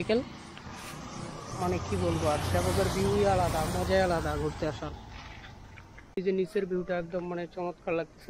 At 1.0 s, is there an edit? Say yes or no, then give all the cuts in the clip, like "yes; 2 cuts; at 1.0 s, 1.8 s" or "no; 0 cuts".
no; 1 cut; at 6.2 s